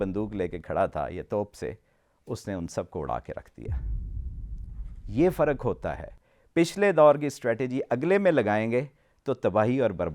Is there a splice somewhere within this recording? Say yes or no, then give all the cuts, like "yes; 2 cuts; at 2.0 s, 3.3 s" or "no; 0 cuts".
no; 0 cuts